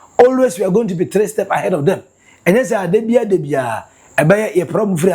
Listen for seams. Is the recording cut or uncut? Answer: uncut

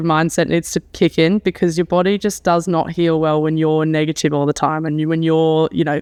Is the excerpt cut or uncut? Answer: uncut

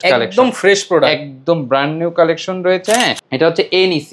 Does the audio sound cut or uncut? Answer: cut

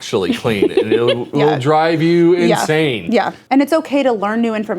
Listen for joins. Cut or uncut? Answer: cut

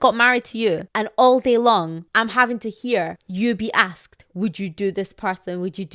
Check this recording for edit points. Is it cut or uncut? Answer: cut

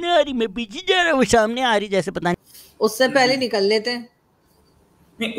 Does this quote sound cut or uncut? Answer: cut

